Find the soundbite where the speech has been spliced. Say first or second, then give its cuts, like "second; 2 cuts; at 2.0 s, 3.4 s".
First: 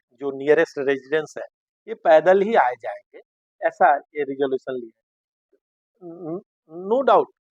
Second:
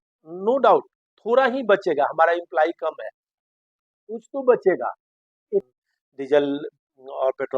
second; 1 cut; at 5.7 s